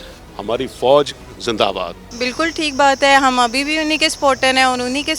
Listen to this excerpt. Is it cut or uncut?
cut